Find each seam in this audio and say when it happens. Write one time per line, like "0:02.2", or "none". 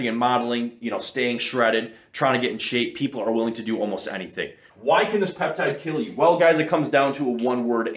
0:04.7